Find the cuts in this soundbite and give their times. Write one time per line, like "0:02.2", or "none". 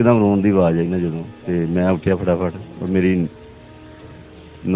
none